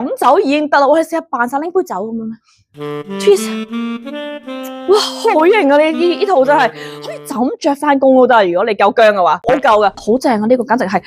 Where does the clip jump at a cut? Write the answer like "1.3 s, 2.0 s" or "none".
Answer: 10.0 s